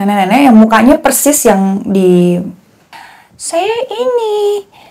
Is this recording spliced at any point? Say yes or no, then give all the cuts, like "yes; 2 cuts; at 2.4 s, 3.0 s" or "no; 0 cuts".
yes; 1 cut; at 2.9 s